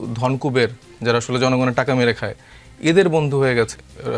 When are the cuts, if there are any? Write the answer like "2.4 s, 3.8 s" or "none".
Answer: none

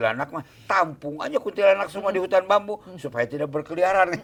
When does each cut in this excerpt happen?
none

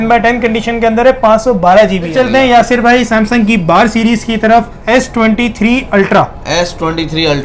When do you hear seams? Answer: 2.1 s, 4.8 s

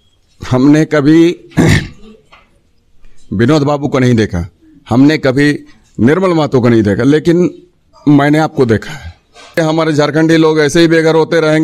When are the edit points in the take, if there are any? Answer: 9.6 s

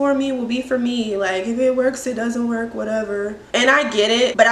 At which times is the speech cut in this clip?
none

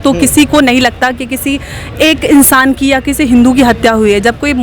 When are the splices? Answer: none

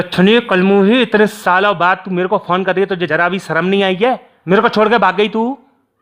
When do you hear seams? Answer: 3.1 s, 4.3 s

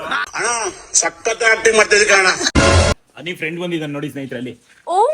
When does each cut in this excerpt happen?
2.9 s

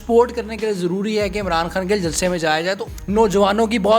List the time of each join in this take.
2.9 s

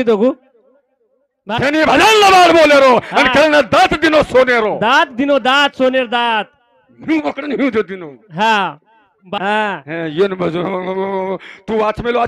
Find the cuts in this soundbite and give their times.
1.6 s, 9.4 s

